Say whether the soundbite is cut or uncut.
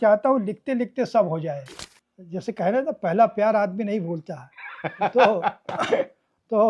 cut